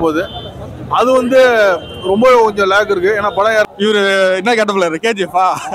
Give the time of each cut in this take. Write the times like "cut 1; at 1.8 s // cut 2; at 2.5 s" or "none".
cut 1; at 3.7 s